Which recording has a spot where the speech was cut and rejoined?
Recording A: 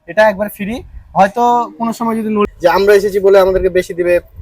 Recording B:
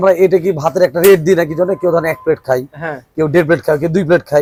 A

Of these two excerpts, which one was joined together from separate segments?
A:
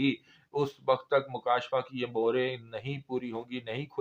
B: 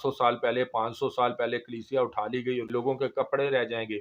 B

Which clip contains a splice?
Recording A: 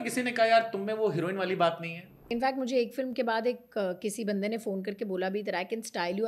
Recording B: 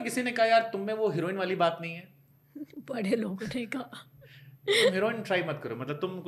A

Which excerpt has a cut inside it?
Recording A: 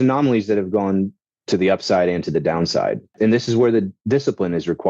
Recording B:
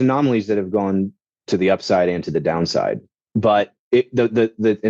A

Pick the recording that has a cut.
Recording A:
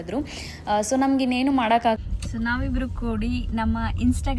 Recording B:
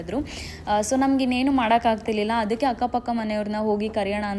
A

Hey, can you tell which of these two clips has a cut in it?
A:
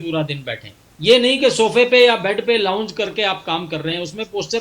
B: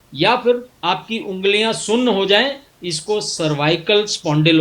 B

